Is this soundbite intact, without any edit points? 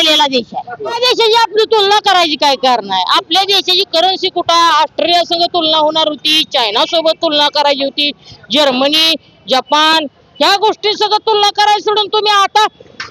no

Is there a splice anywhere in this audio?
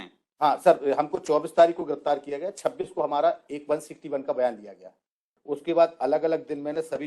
yes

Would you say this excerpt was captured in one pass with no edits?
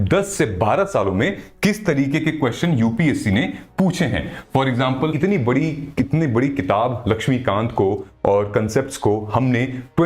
no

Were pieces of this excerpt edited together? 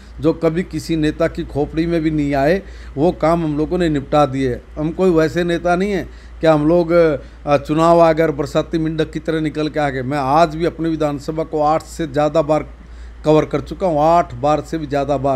no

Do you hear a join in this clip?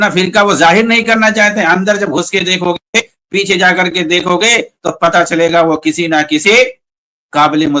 no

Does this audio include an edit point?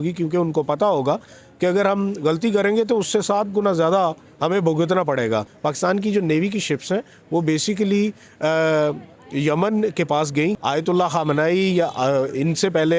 yes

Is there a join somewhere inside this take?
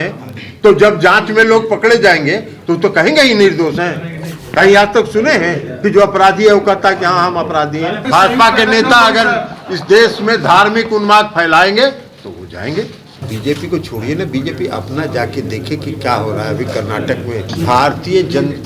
yes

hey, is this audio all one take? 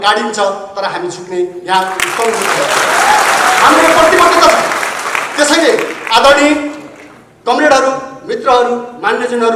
yes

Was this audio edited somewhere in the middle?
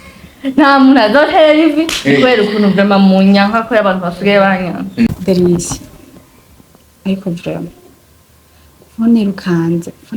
yes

